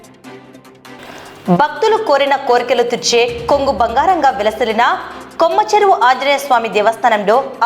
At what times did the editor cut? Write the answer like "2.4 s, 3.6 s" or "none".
1.0 s